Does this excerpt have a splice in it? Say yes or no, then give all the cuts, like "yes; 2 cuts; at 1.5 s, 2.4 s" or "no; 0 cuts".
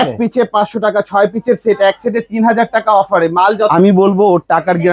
yes; 1 cut; at 3.7 s